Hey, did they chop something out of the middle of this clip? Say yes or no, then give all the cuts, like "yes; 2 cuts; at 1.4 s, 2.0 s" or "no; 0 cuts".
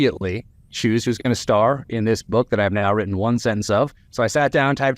yes; 1 cut; at 4.0 s